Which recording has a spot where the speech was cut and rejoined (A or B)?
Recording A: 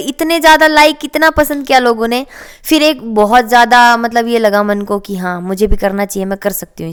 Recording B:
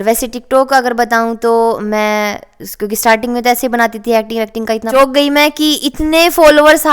B